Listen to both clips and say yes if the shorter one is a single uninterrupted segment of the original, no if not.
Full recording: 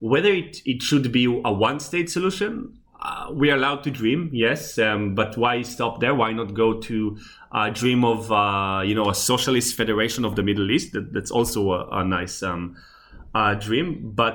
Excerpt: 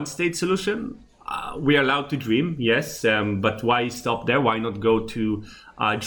yes